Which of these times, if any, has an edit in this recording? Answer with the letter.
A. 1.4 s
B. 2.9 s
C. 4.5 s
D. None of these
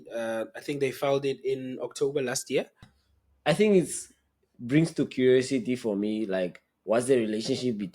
B